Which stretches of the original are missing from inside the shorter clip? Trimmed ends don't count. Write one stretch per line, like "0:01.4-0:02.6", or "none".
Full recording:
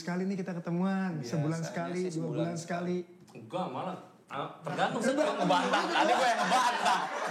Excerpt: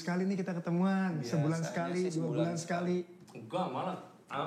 none